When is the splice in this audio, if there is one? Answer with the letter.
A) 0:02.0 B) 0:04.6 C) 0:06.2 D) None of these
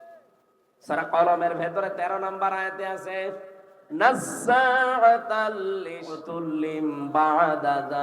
C